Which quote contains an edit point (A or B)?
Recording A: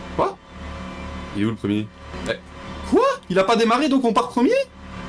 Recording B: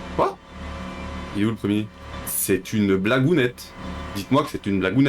B